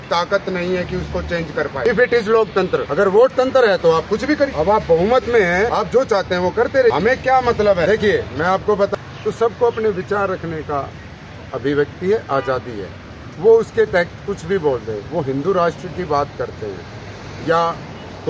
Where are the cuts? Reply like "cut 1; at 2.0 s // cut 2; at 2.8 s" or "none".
cut 1; at 1.8 s // cut 2; at 2.9 s // cut 3; at 4.5 s // cut 4; at 5.7 s // cut 5; at 6.9 s // cut 6; at 7.9 s // cut 7; at 8.9 s